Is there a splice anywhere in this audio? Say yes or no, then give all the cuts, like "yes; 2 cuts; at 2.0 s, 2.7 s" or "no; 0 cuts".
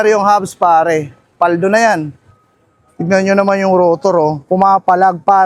no; 0 cuts